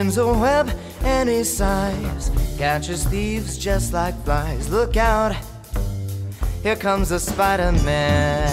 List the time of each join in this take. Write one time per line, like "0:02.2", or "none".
none